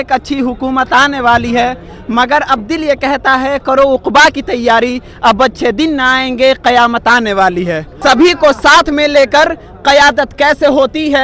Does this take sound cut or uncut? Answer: cut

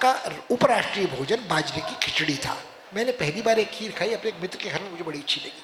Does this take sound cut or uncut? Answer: cut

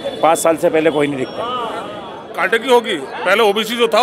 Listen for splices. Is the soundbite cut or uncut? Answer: cut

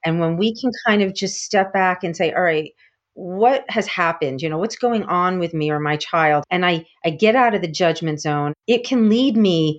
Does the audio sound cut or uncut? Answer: cut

